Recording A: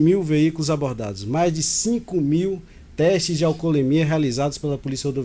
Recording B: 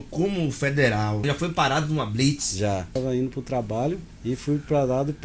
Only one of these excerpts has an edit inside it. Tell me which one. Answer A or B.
B